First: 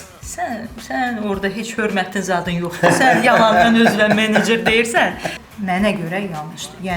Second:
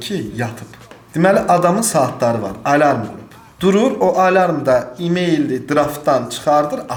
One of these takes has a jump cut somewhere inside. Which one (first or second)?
first